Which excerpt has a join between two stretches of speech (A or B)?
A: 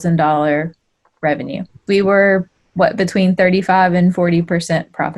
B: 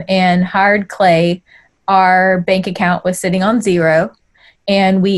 A